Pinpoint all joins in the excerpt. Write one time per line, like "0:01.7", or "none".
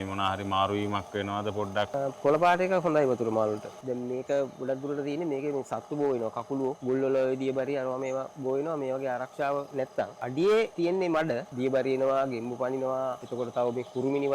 0:01.9
0:03.7
0:06.8
0:10.2
0:11.3
0:13.2